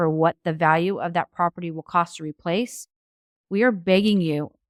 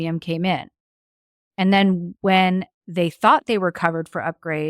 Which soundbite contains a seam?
second; 1 cut; at 2.1 s

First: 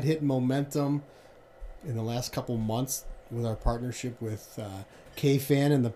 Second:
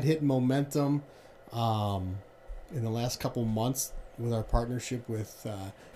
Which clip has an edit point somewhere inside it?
first; 1 cut; at 1.4 s

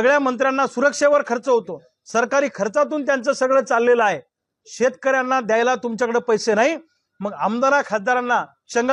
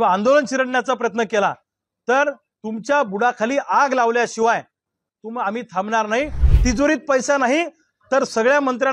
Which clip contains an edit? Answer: second; 1 cut; at 6.4 s

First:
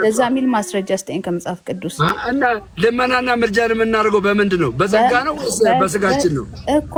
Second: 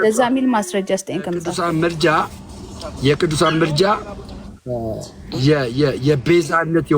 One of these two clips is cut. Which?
second; 1 cut; at 1.5 s

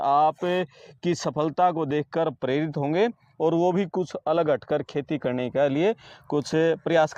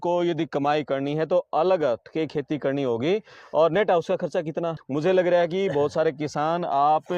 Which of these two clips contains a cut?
second; 1 cut; at 4.8 s

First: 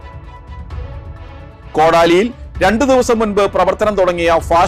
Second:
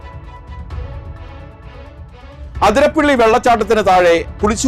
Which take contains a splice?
second; 2 cuts; at 1.2 s, 2.3 s

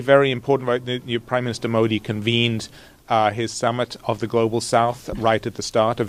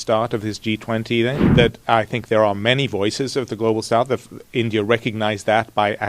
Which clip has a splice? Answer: second; 1 cut; at 1.4 s

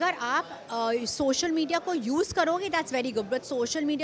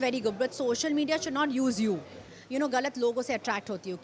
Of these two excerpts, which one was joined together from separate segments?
second; 1 cut; at 2.3 s

